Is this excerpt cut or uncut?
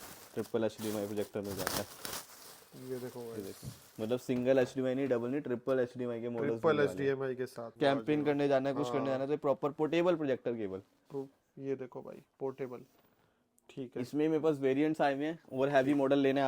cut